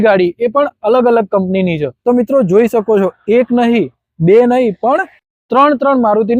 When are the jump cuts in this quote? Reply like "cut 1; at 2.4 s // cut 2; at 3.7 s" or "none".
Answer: cut 1; at 1.9 s